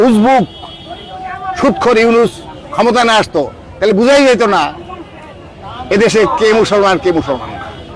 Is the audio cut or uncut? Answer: uncut